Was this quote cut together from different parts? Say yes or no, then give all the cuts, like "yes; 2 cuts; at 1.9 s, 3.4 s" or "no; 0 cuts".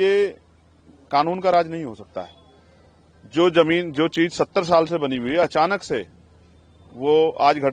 no; 0 cuts